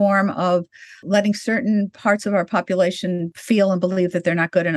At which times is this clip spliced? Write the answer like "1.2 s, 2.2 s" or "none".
1.0 s, 3.3 s